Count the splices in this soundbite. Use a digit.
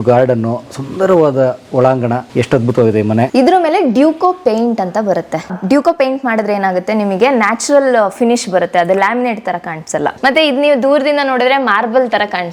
4